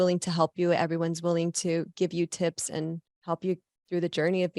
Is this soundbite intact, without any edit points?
no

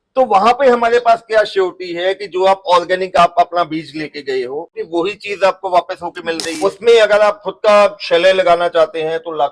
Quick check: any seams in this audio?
yes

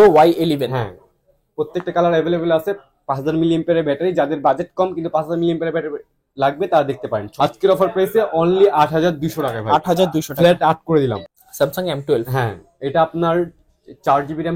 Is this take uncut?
no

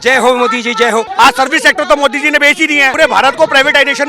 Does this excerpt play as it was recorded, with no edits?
no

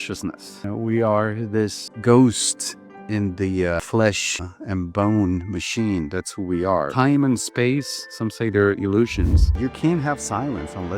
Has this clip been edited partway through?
yes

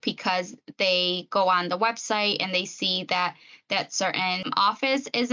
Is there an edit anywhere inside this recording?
no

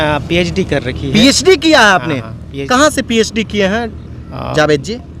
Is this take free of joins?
no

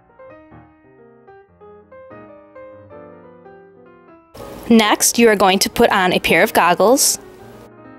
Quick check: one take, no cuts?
yes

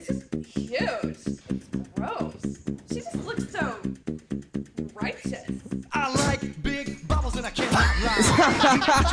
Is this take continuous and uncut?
yes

